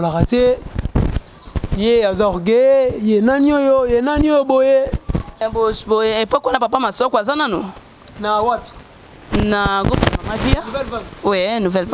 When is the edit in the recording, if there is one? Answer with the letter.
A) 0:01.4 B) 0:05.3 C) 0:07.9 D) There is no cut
B